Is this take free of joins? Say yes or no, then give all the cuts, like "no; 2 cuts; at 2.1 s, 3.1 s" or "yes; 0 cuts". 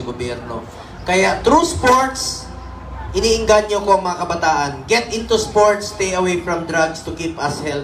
yes; 0 cuts